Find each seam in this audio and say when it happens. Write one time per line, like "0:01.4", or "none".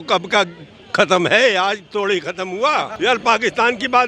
0:02.9